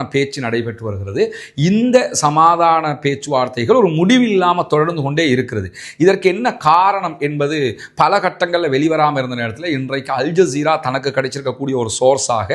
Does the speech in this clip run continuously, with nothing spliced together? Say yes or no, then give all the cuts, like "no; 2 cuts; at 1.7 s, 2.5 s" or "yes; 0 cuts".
yes; 0 cuts